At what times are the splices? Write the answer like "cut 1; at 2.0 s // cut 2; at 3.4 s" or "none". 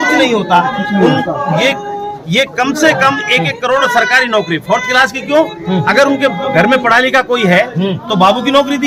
none

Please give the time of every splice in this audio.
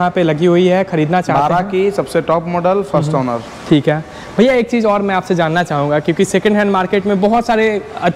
none

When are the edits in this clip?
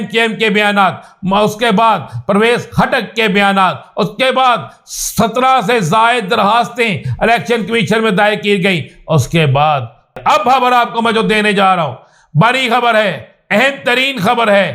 cut 1; at 10.1 s

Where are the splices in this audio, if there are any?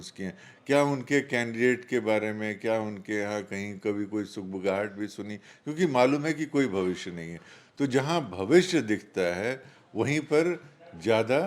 none

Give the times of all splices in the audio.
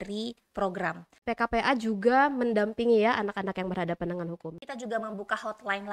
cut 1; at 1.2 s // cut 2; at 4.6 s

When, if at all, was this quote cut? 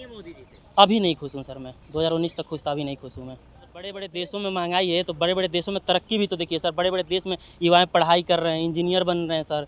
cut 1; at 4.0 s

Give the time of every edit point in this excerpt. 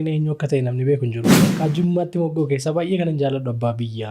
cut 1; at 1.6 s

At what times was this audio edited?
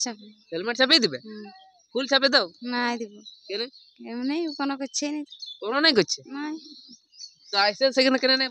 none

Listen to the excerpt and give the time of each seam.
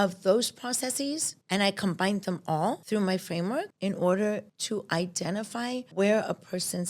cut 1; at 1.3 s // cut 2; at 2.8 s // cut 3; at 3.7 s // cut 4; at 4.5 s // cut 5; at 5.9 s

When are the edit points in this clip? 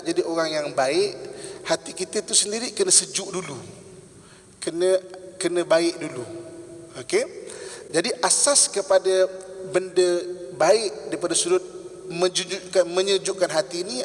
none

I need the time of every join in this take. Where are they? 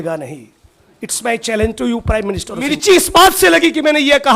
cut 1; at 2.7 s

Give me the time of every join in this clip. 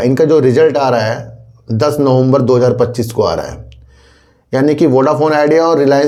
none

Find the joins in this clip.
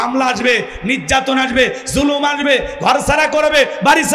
none

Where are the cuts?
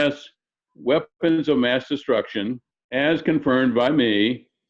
cut 1; at 2.7 s

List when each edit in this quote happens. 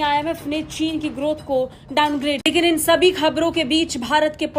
cut 1; at 2.5 s

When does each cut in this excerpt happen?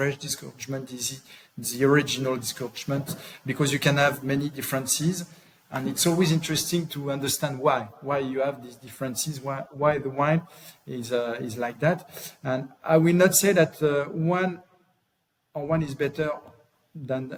none

